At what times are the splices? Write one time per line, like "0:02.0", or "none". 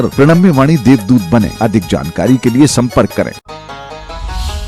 0:03.4